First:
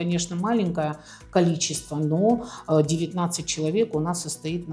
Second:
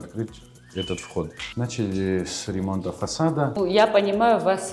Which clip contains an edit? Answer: second; 2 cuts; at 1.4 s, 3.6 s

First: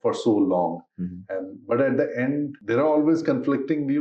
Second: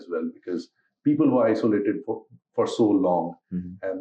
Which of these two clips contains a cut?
first; 1 cut; at 2.6 s

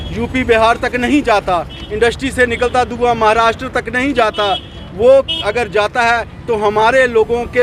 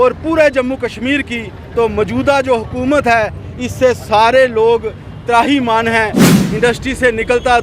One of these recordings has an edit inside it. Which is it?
second; 1 cut; at 6.3 s

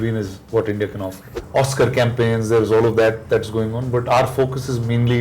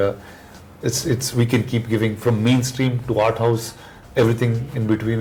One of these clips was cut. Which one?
first; 1 cut; at 1.4 s

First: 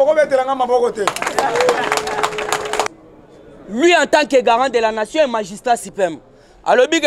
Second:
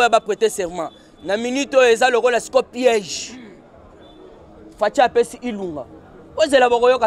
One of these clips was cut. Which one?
first; 1 cut; at 2.9 s

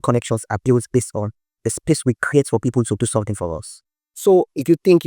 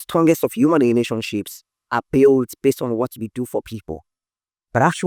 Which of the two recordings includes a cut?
first; 1 cut; at 4.1 s

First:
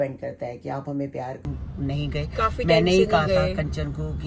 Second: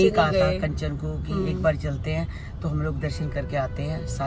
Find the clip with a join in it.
first; 1 cut; at 1.5 s

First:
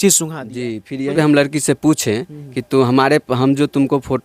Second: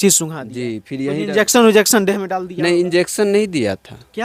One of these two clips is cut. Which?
first; 1 cut; at 1.1 s

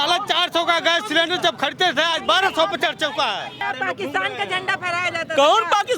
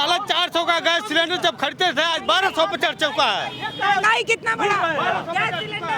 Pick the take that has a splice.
first; 1 cut; at 3.6 s

